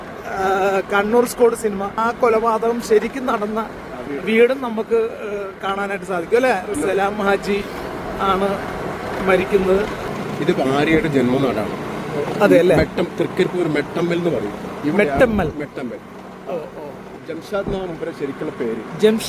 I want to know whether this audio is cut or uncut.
cut